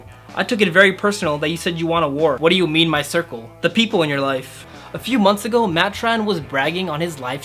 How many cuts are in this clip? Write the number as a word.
two